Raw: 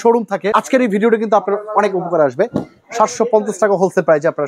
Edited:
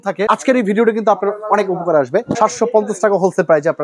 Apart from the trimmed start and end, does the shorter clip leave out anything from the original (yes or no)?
yes